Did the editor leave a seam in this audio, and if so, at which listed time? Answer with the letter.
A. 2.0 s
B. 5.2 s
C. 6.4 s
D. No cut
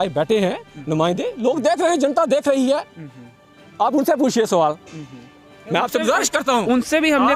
D